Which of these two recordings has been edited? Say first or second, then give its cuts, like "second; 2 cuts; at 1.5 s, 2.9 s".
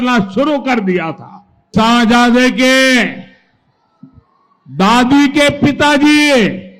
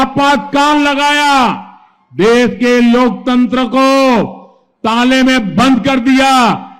first; 1 cut; at 1.7 s